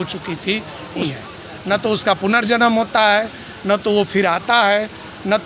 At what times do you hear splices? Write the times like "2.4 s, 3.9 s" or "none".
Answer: 1.1 s

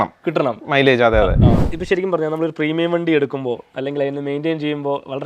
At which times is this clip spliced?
1.7 s

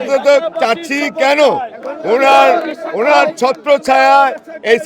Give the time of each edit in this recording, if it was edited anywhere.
none

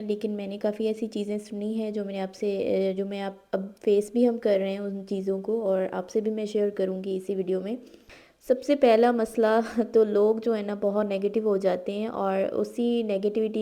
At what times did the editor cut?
8.0 s

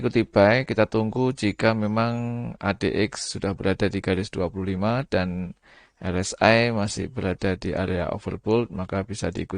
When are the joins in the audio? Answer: none

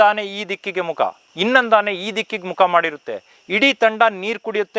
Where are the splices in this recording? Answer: none

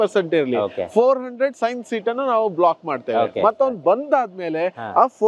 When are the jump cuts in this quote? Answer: none

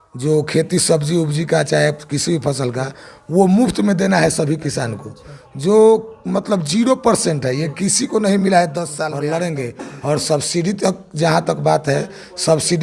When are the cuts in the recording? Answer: 9.1 s

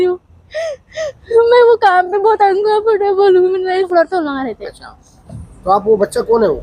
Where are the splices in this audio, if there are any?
3.9 s

